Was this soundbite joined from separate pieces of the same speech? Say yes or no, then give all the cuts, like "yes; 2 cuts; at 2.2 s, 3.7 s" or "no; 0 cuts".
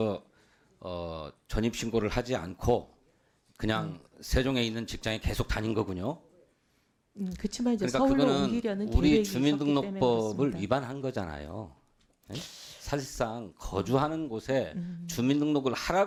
no; 0 cuts